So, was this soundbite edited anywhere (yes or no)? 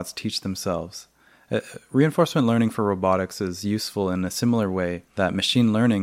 no